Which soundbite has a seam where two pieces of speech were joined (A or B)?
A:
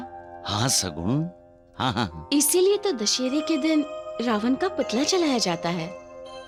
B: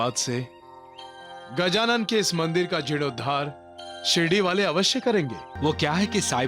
B